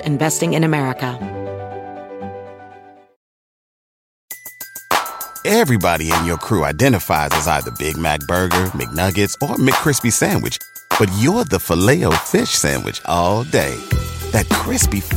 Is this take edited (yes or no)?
yes